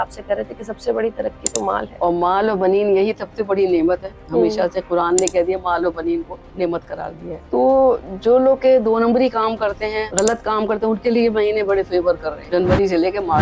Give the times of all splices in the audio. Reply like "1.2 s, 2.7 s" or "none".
1.9 s, 7.3 s, 10.1 s, 12.4 s